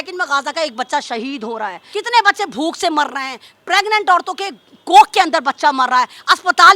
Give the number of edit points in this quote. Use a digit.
1